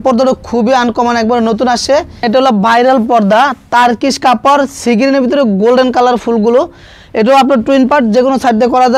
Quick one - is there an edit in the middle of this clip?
yes; 1 cut; at 2.2 s

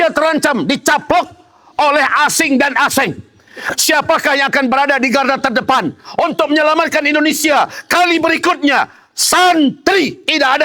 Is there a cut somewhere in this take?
no; 0 cuts

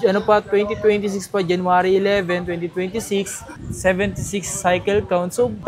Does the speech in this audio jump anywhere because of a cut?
no; 0 cuts

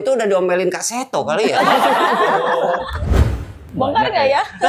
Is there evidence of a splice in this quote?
yes; 1 cut; at 3.0 s

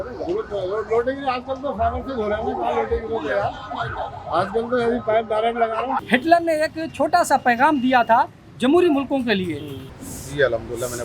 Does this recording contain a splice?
yes; 2 cuts; at 6.0 s, 9.8 s

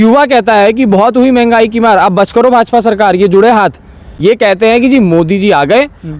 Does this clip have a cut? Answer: yes; 1 cut; at 4.0 s

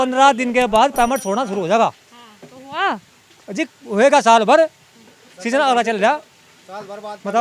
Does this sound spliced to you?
no; 0 cuts

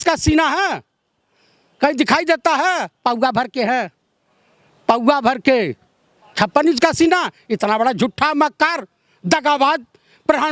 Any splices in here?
no; 0 cuts

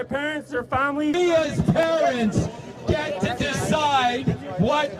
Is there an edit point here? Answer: yes; 1 cut; at 1.1 s

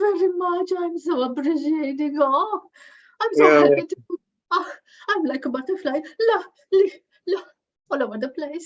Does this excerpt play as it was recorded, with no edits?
yes; 0 cuts

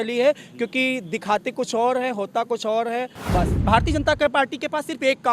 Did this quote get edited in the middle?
yes; 1 cut; at 3.6 s

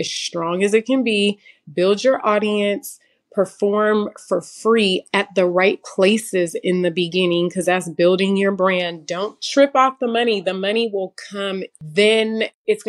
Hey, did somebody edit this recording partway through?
yes; 1 cut; at 11.7 s

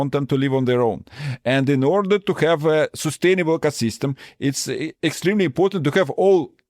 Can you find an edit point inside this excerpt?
yes; 1 cut; at 4.9 s

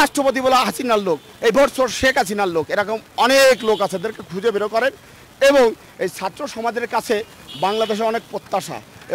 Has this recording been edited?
no; 0 cuts

